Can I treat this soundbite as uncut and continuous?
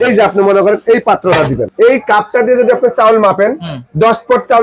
no; 1 cut; at 1.6 s

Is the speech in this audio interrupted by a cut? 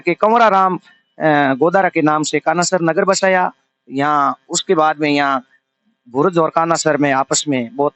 no; 0 cuts

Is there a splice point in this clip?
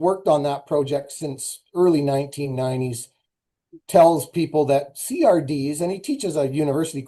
no; 0 cuts

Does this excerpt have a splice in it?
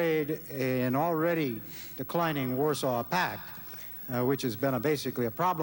no; 0 cuts

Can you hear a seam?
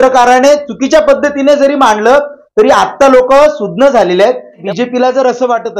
yes; 1 cut; at 4.6 s

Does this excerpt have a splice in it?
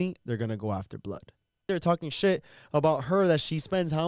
yes; 1 cut; at 1.6 s

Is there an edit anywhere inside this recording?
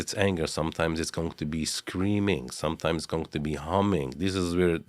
no; 0 cuts

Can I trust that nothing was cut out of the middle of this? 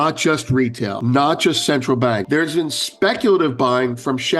no; 2 cuts; at 1.0 s, 2.2 s

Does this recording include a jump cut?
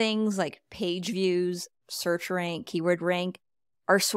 no; 0 cuts

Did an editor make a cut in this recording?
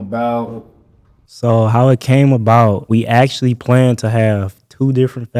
yes; 1 cut; at 2.8 s

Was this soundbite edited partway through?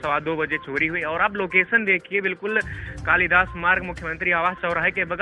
no; 0 cuts

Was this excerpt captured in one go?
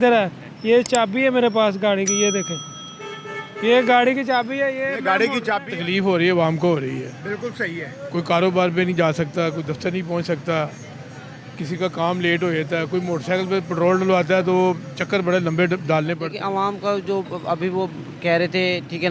no; 2 cuts; at 5.7 s, 16.3 s

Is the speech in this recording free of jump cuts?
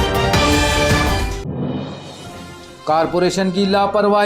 no; 1 cut; at 2.5 s

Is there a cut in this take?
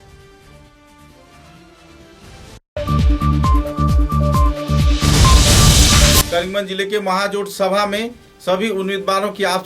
yes; 2 cuts; at 2.5 s, 6.2 s

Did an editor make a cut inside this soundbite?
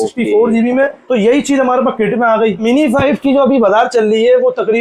yes; 2 cuts; at 1.0 s, 2.6 s

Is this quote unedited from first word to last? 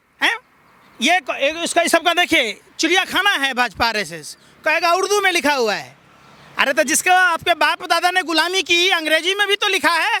yes; 0 cuts

